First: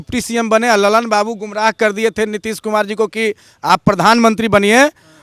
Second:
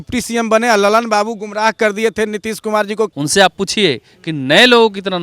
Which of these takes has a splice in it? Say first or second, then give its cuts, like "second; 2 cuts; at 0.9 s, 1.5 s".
second; 1 cut; at 3.1 s